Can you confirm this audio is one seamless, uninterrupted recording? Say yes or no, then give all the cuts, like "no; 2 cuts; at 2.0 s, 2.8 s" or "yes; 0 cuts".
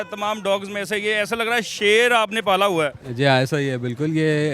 yes; 0 cuts